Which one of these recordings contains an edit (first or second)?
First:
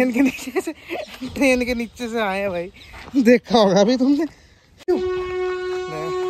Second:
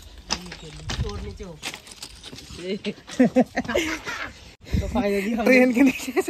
first